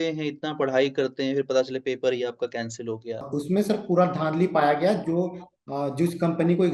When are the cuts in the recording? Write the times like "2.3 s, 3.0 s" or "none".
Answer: 3.3 s